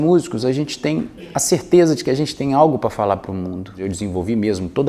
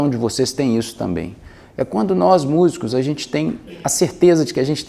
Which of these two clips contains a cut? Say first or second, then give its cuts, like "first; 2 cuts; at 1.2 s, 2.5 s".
first; 1 cut; at 3.8 s